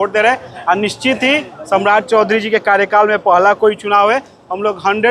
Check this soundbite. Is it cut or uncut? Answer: uncut